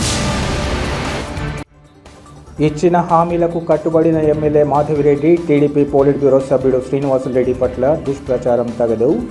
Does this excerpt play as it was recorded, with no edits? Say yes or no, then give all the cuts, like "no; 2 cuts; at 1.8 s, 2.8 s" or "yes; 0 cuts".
no; 1 cut; at 0.9 s